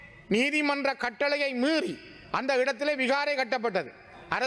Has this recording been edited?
no; 0 cuts

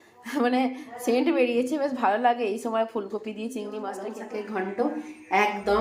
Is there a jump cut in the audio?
yes; 1 cut; at 4.1 s

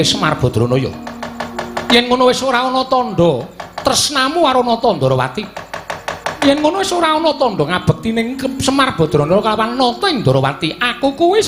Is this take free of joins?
yes; 0 cuts

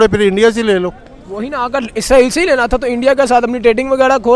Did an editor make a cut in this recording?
no; 0 cuts

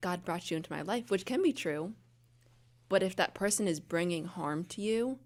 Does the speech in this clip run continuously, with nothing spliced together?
yes; 0 cuts

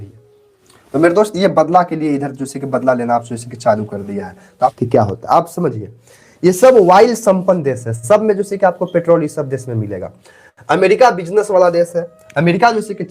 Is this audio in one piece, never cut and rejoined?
no; 1 cut; at 4.7 s

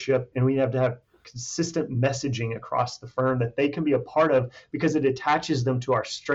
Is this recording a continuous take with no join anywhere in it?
yes; 0 cuts

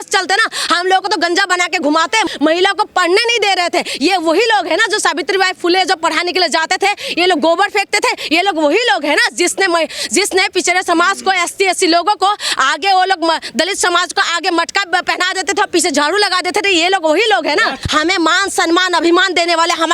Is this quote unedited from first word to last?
no; 2 cuts; at 2.3 s, 17.8 s

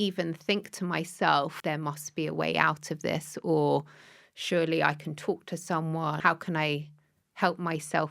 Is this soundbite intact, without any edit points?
no; 2 cuts; at 1.6 s, 6.2 s

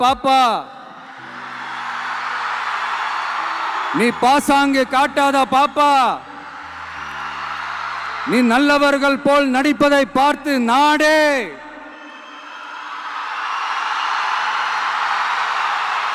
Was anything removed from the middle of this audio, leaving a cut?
no; 0 cuts

